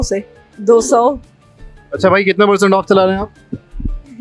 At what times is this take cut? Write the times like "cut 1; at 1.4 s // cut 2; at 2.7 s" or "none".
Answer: cut 1; at 1.3 s